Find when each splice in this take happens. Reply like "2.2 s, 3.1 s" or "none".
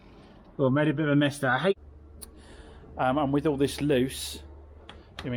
1.8 s

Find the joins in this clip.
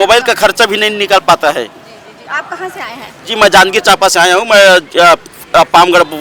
none

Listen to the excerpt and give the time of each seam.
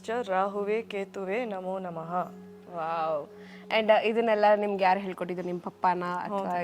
none

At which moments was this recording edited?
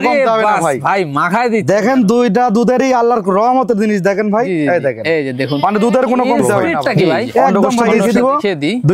7.8 s

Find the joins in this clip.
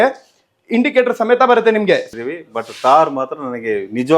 2.1 s

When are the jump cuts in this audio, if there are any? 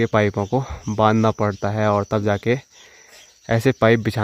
none

